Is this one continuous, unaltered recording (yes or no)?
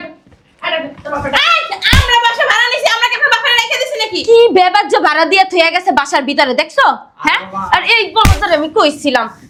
yes